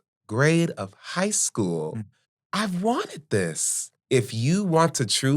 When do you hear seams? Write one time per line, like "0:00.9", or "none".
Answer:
0:03.9